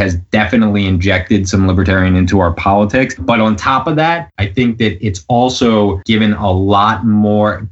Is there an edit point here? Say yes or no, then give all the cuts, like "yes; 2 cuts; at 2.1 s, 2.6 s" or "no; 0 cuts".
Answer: yes; 3 cuts; at 3.2 s, 4.3 s, 6.0 s